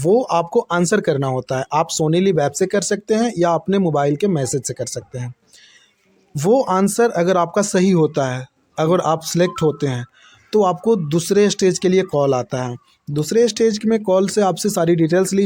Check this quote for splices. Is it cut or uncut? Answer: uncut